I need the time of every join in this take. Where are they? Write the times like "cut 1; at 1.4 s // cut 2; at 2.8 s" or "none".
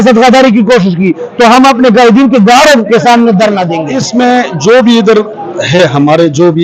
cut 1; at 3.8 s